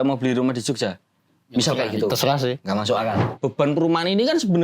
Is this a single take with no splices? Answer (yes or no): no